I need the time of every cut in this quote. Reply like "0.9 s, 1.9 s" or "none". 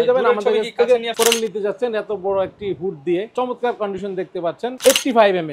1.1 s, 3.3 s, 4.8 s